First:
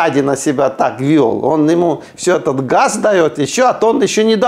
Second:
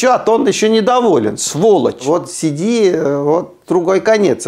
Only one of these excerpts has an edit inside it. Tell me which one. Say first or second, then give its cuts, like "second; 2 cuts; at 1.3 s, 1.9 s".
second; 1 cut; at 2.0 s